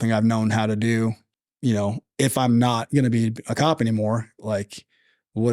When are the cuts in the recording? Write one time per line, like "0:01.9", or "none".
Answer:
0:01.3